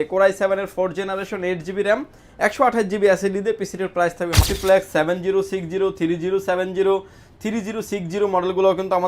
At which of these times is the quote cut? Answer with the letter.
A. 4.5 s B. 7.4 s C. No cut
A